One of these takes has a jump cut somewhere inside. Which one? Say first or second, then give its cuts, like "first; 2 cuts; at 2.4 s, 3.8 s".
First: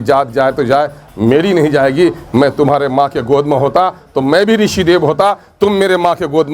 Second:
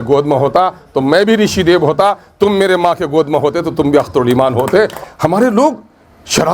second; 1 cut; at 5.0 s